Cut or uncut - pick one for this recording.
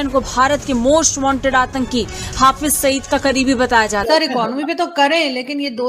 cut